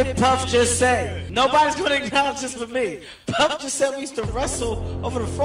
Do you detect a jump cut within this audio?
yes; 1 cut; at 1.2 s

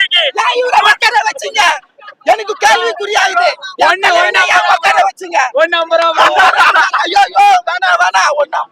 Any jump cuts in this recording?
no; 0 cuts

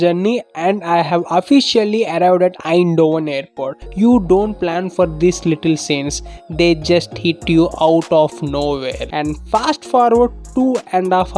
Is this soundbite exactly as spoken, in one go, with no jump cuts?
no; 2 cuts; at 3.8 s, 9.0 s

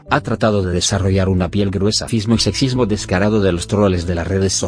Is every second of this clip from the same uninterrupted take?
yes; 0 cuts

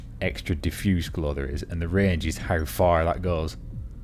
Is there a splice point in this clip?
no; 0 cuts

